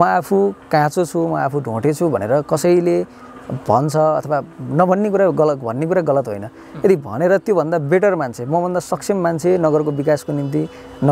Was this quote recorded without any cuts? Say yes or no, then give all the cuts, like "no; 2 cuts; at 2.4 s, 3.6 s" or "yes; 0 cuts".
yes; 0 cuts